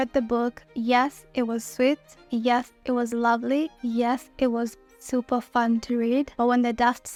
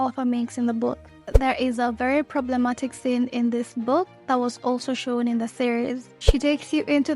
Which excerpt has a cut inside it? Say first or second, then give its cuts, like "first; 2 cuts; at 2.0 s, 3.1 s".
second; 2 cuts; at 1.3 s, 6.2 s